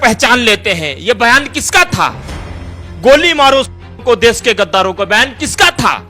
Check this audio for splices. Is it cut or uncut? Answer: uncut